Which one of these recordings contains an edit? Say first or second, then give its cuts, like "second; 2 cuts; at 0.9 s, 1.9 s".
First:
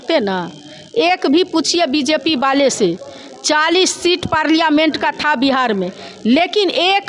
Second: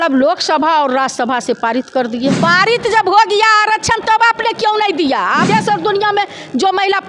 second; 2 cuts; at 2.4 s, 5.5 s